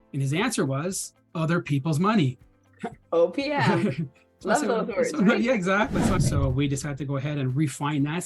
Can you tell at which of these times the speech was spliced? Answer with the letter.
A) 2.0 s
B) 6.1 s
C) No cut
B